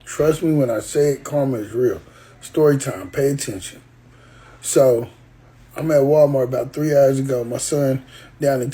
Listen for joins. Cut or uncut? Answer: uncut